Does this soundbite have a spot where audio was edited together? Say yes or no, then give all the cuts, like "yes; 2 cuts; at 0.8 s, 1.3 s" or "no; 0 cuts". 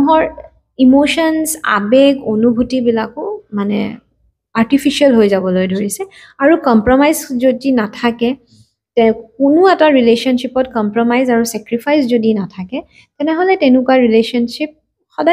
no; 0 cuts